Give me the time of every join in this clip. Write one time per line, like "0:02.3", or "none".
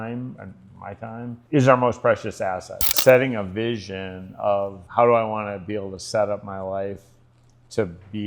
0:01.4
0:03.0
0:04.8

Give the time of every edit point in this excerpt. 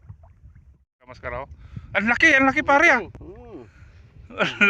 0:01.1

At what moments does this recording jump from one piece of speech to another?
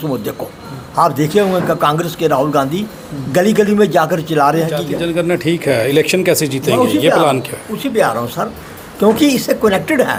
none

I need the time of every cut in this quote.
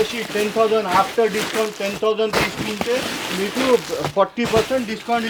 none

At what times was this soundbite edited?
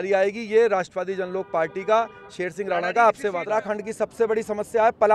0:03.4

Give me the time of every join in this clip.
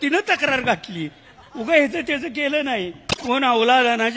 0:03.2

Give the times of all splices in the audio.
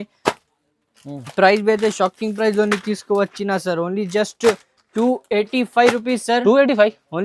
none

